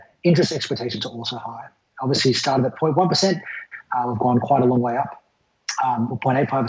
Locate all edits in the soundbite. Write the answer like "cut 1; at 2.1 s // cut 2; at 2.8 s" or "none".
cut 1; at 3.7 s